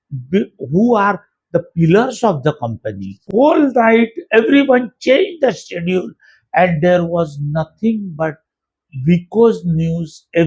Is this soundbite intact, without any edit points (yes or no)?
no